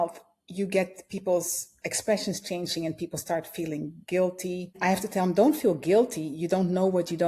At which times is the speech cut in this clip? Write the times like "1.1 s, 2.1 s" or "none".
4.8 s